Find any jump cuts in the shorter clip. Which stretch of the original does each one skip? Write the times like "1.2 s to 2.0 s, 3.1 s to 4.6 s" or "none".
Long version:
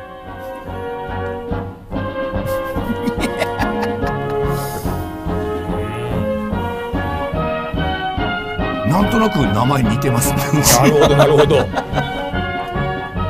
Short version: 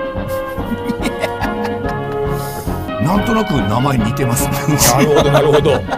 5.1 s to 8.8 s

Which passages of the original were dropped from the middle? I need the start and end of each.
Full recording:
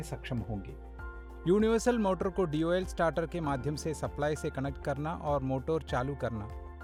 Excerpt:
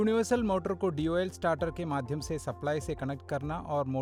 none

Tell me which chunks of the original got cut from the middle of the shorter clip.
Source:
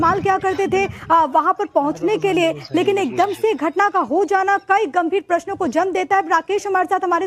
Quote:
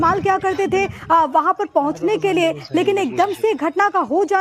none

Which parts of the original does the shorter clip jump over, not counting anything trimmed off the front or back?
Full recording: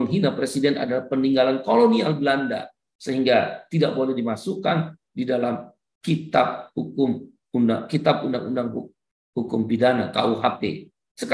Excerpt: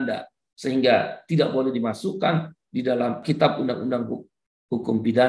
5.6 s to 7.9 s

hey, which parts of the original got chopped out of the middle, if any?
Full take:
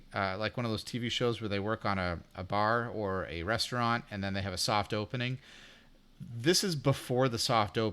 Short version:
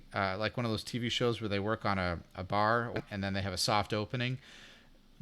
3.0 s to 4.0 s

